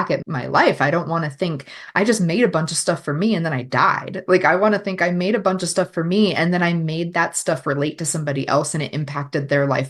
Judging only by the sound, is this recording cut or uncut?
uncut